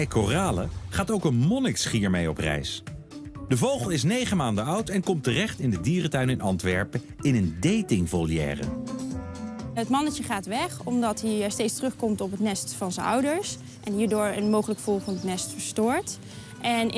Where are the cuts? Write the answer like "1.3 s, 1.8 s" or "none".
none